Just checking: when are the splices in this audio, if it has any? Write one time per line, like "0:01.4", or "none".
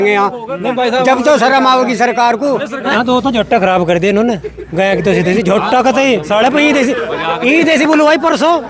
0:02.9